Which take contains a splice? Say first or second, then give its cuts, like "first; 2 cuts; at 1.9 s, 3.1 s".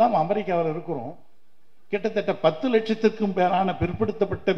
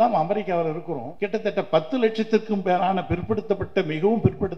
second; 1 cut; at 1.0 s